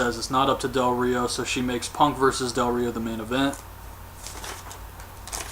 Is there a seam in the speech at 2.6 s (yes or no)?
yes